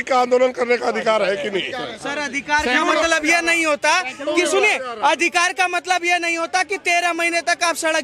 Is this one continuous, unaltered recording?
yes; 0 cuts

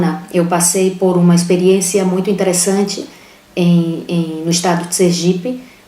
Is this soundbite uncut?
no; 1 cut; at 3.0 s

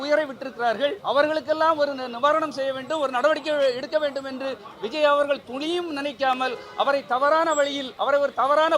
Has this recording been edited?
yes; 2 cuts; at 1.0 s, 7.9 s

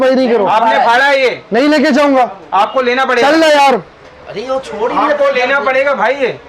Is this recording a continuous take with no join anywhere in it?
yes; 0 cuts

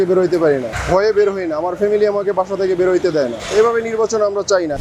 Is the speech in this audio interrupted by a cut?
no; 0 cuts

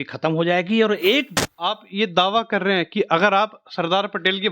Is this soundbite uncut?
no; 1 cut; at 1.4 s

